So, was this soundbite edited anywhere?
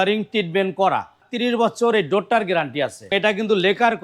yes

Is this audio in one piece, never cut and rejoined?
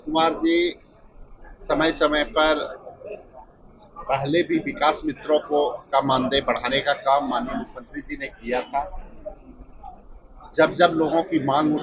yes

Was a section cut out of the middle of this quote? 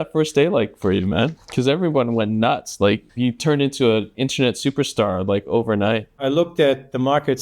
yes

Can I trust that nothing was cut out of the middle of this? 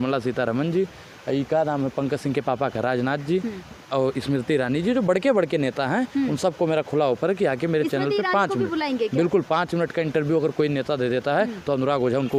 yes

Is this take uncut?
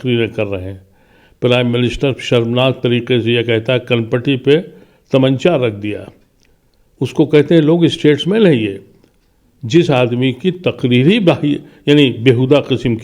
yes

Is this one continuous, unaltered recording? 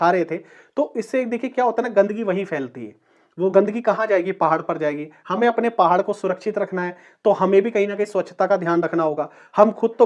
yes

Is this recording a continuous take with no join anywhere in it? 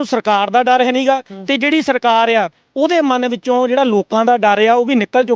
yes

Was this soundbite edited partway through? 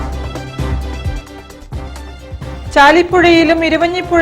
yes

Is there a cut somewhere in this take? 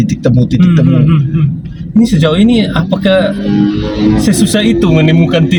no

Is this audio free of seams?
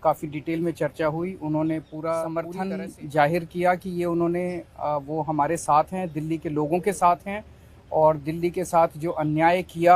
no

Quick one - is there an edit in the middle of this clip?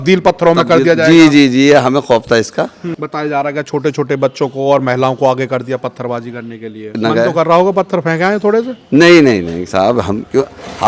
yes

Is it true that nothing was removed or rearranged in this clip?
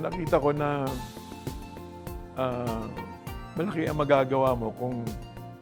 yes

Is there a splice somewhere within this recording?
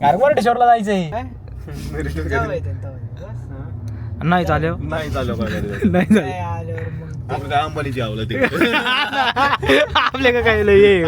yes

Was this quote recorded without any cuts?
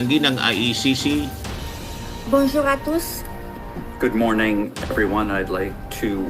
no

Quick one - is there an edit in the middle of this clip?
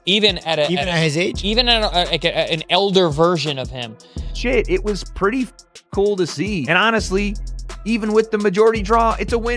yes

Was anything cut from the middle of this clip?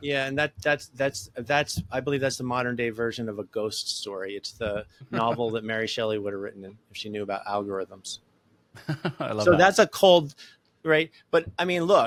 no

